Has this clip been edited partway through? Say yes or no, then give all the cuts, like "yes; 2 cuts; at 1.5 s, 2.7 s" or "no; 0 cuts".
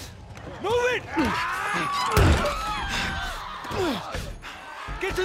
yes; 1 cut; at 1.1 s